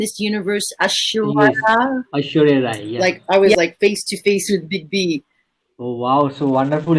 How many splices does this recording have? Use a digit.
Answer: 1